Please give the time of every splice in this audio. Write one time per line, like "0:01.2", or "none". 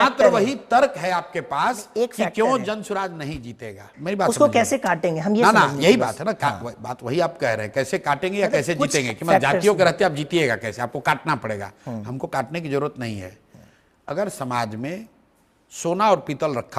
none